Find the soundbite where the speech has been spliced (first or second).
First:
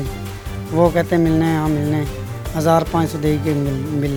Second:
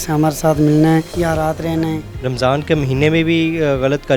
second